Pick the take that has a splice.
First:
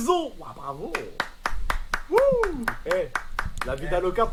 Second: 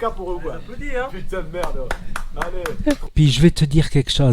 second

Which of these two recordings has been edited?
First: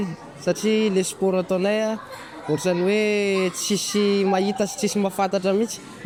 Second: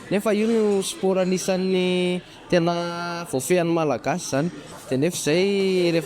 second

